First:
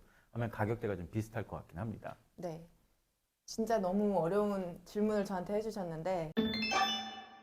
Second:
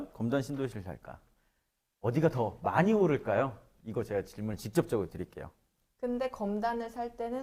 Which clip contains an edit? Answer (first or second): first